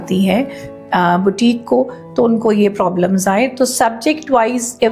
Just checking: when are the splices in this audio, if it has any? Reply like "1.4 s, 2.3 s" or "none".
none

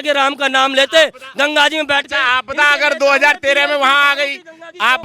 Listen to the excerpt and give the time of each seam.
none

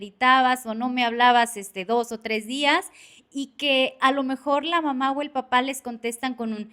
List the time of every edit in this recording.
none

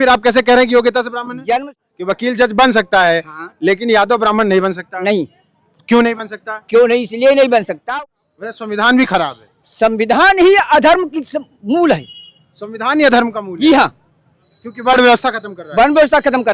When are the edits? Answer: 1.7 s, 7.8 s

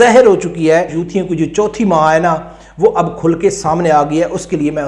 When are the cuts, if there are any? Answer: 1.0 s

